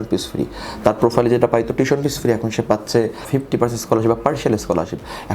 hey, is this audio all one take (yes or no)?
no